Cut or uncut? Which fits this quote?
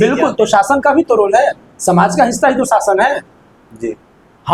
uncut